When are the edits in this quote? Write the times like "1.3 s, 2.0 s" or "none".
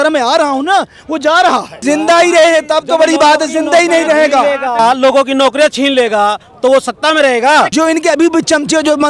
1.7 s, 4.8 s, 7.7 s